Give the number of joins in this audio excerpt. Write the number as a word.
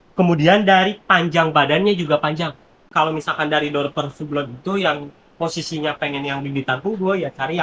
one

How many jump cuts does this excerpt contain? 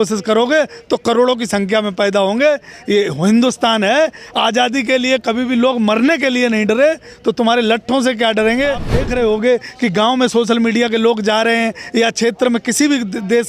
one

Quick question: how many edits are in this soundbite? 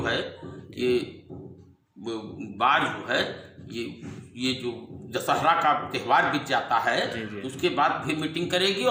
zero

